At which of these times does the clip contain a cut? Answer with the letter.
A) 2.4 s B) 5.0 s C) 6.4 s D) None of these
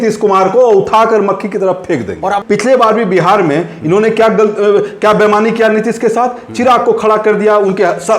A